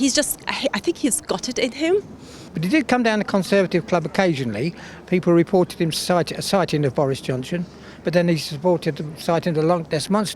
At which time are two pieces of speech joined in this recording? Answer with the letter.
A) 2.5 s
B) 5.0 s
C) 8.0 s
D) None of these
A